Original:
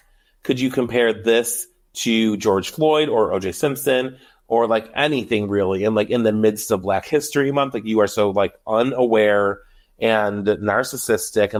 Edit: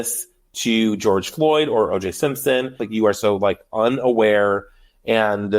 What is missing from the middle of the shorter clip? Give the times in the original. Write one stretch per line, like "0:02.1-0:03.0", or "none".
0:04.2-0:07.8